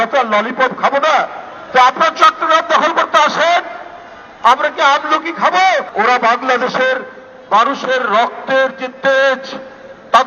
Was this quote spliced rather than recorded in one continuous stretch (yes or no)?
yes